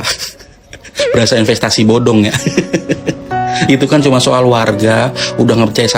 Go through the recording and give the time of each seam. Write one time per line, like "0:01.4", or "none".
none